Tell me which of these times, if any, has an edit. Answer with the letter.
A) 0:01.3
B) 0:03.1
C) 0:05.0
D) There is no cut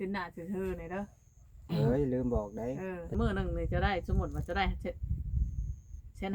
B